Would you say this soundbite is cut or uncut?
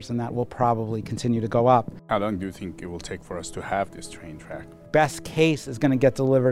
cut